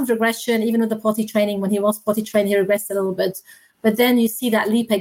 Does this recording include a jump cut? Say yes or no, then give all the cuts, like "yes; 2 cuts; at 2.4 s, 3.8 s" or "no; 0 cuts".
no; 0 cuts